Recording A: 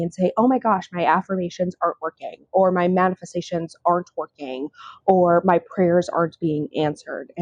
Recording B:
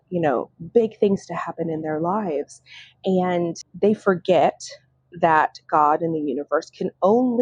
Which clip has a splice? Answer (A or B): B